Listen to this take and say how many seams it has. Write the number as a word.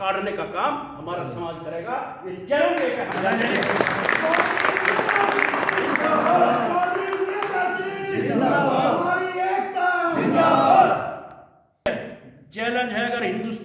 one